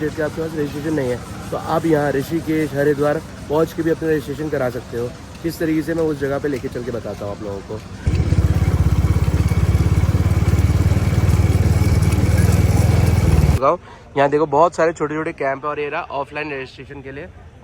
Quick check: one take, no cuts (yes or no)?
no